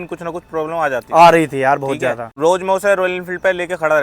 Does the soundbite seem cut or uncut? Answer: cut